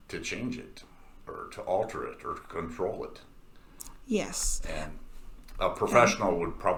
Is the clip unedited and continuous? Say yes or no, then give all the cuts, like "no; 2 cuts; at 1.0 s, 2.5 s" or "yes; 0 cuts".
yes; 0 cuts